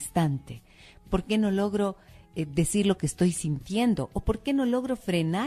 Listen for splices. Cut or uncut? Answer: uncut